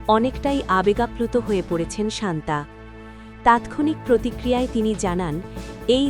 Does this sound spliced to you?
no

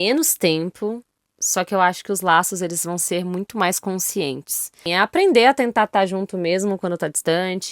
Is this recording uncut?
no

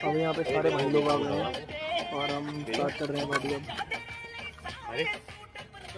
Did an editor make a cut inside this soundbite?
no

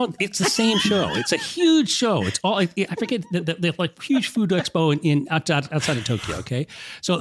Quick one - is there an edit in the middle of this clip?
no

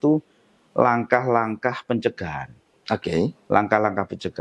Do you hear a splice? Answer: no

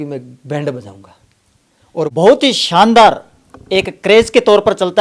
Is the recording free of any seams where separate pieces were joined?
no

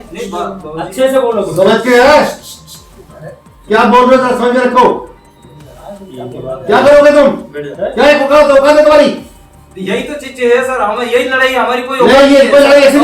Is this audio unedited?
yes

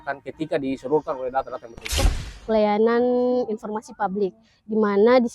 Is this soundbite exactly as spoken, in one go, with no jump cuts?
no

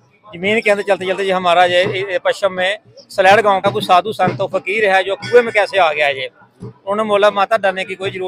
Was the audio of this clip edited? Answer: yes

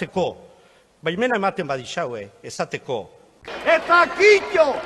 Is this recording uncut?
yes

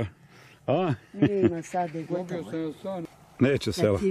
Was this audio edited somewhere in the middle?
yes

